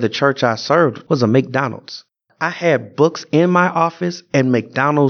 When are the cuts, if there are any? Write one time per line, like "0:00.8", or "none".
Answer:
0:01.0